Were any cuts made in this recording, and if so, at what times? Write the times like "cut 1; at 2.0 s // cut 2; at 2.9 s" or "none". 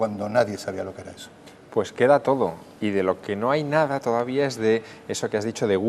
cut 1; at 2.2 s

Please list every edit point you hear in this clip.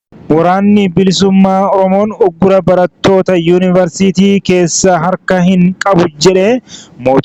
none

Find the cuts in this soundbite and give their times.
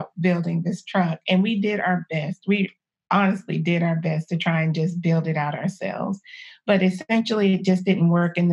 none

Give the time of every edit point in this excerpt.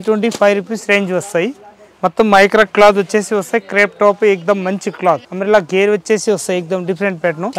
none

